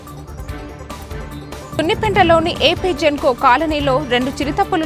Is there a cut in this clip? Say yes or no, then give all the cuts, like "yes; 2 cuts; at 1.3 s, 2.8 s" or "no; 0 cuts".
yes; 1 cut; at 1.8 s